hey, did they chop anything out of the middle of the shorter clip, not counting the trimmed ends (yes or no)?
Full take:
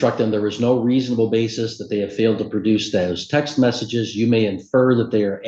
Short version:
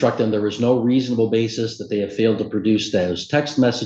no